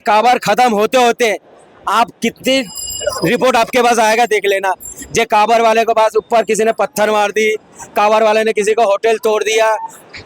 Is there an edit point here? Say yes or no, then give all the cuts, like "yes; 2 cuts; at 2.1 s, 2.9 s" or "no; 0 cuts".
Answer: no; 0 cuts